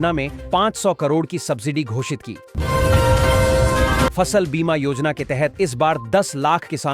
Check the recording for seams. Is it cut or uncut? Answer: cut